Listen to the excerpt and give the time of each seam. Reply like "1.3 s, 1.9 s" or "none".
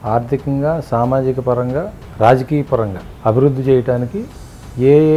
2.0 s, 3.0 s